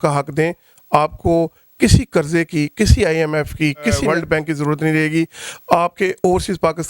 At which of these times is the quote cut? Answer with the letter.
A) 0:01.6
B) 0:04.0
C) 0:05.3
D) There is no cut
B